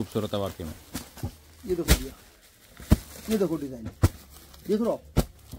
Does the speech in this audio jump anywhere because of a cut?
no; 0 cuts

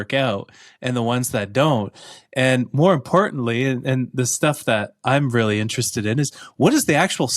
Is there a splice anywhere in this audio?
no; 0 cuts

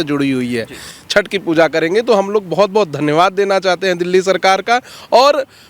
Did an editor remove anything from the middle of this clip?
yes; 1 cut; at 0.9 s

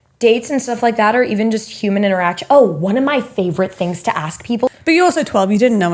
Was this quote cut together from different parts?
yes; 1 cut; at 4.7 s

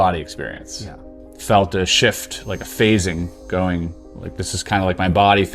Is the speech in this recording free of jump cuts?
no; 1 cut; at 1.0 s

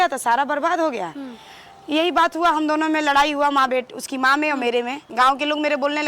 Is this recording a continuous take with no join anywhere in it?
no; 1 cut; at 5.0 s

